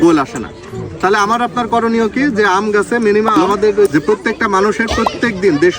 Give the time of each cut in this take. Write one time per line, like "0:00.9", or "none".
0:03.9